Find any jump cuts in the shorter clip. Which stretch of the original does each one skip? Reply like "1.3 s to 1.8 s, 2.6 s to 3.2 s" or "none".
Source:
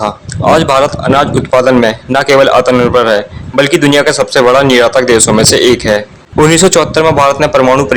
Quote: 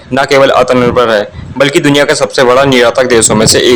none